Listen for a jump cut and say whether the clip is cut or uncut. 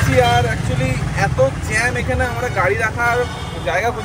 uncut